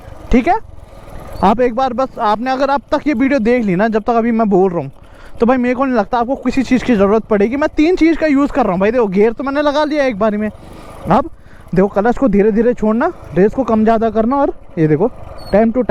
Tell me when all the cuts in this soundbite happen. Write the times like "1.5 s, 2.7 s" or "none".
none

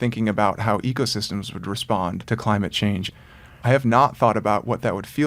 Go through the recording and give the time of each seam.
2.2 s, 3.0 s

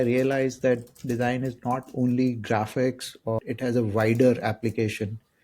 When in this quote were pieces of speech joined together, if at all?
3.4 s

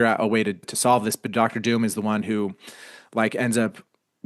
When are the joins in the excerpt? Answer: none

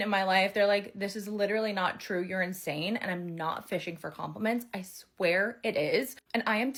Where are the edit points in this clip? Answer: none

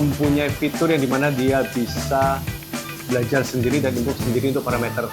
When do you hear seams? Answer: none

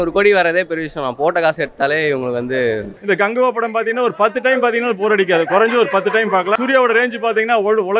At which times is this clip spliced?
2.9 s, 6.6 s

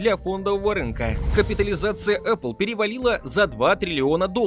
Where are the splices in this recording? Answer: 1.3 s

